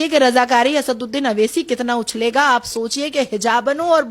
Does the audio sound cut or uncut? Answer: uncut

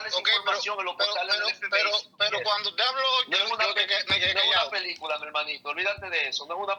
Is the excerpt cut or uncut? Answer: uncut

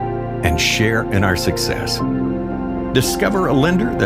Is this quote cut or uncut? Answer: uncut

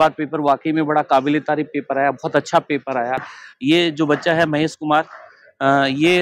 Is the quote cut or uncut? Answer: cut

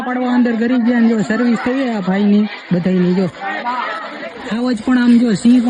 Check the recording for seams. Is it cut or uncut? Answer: uncut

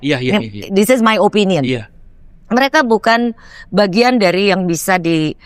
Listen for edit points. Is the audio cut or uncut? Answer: uncut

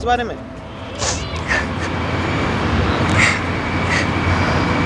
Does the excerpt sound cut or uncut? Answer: uncut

